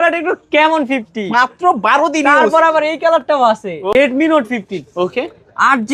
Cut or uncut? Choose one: cut